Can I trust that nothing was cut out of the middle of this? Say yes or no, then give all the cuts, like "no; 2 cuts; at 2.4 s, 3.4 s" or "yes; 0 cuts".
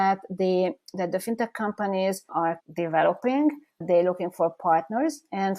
yes; 0 cuts